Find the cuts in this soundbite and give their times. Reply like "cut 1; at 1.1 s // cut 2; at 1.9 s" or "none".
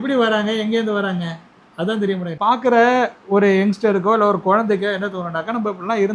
cut 1; at 2.4 s